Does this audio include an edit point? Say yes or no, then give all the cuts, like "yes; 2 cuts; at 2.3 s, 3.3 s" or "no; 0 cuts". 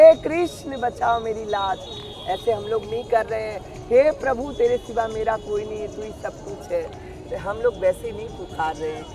no; 0 cuts